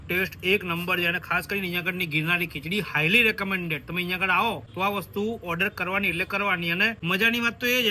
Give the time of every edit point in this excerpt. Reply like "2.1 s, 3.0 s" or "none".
4.7 s, 7.0 s